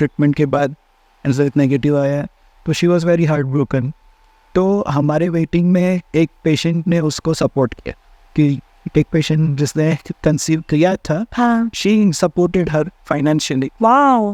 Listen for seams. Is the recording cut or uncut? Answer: uncut